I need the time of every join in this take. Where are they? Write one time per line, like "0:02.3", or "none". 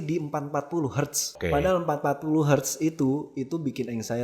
0:01.3